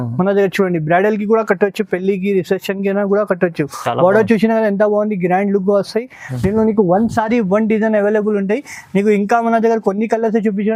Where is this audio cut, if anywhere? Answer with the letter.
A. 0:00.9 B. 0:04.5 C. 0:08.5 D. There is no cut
D